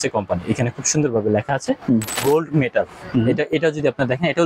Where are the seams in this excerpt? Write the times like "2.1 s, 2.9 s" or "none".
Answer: 2.2 s